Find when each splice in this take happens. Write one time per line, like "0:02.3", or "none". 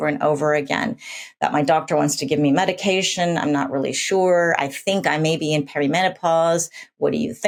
none